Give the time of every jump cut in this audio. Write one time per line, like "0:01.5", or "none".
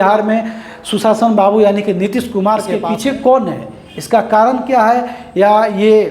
0:02.8